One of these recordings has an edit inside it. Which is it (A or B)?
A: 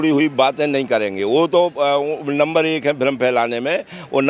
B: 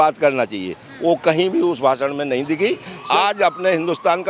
B